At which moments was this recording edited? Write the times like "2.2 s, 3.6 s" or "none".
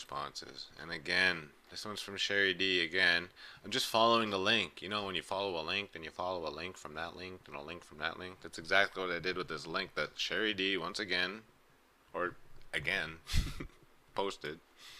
3.3 s